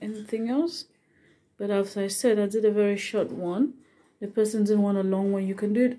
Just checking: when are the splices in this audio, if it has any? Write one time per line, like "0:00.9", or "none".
none